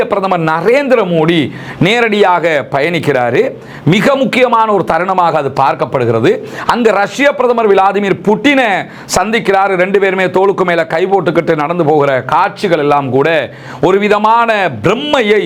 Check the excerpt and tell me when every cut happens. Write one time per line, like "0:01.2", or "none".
none